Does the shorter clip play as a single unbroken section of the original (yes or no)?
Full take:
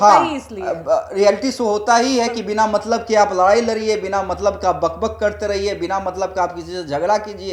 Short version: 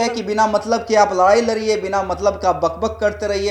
yes